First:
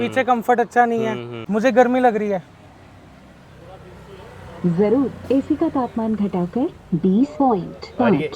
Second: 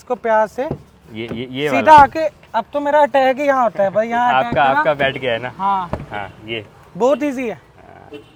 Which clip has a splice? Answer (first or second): first